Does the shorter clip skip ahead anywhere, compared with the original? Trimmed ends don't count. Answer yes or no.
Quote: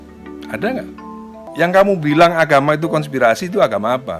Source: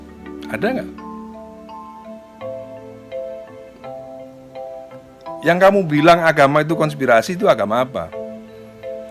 yes